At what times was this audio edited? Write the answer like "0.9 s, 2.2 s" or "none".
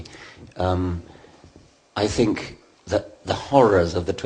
2.6 s